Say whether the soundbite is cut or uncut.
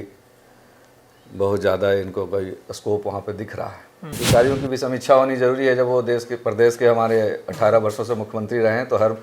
cut